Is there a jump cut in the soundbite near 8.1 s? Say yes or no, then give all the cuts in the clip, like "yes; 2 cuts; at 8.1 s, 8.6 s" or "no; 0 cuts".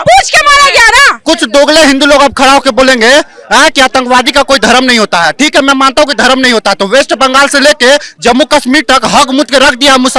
no; 1 cut; at 1.2 s